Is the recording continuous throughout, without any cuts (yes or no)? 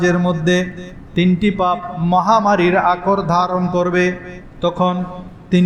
yes